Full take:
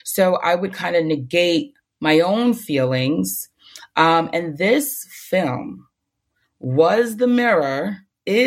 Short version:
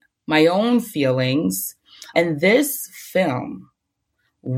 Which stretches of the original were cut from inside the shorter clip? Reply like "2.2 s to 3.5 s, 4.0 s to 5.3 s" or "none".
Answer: 3.8 s to 4.3 s